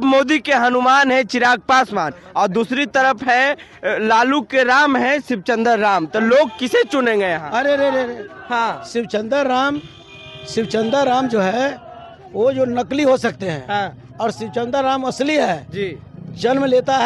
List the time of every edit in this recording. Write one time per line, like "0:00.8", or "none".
none